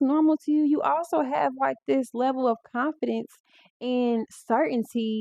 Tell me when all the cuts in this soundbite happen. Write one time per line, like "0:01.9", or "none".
none